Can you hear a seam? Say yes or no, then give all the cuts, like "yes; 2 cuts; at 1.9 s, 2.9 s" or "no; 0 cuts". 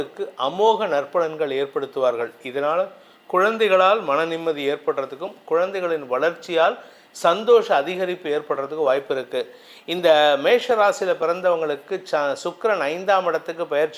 no; 0 cuts